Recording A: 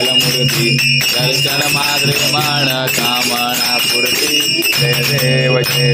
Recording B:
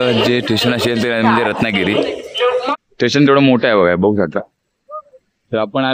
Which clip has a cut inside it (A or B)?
B